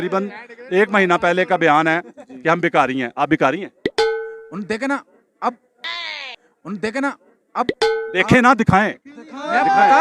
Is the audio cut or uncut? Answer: uncut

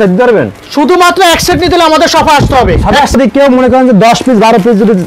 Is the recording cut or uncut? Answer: cut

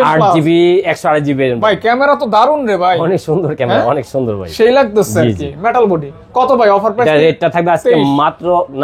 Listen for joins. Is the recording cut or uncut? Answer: uncut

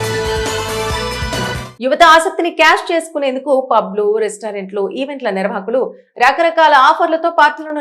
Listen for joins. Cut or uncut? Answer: uncut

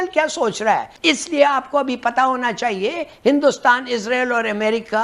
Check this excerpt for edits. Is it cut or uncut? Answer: cut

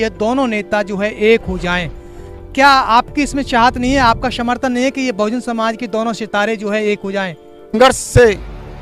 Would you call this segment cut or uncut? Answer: cut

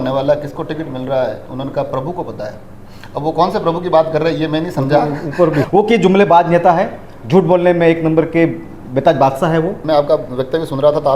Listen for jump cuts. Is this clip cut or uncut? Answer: cut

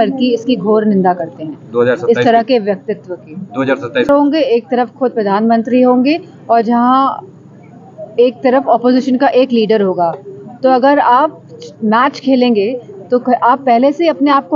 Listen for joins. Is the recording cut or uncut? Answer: cut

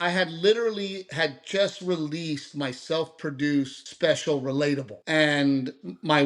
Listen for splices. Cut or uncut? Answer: cut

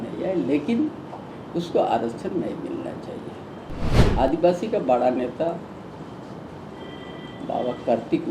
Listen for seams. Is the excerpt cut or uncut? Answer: cut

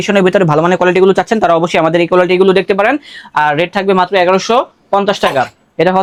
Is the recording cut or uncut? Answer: uncut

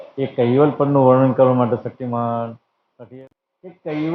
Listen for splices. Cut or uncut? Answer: cut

